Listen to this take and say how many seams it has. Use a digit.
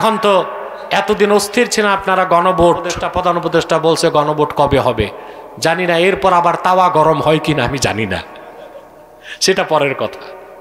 1